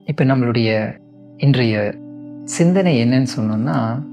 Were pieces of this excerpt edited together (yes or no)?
no